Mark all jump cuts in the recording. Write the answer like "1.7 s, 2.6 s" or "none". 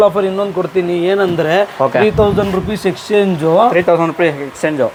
none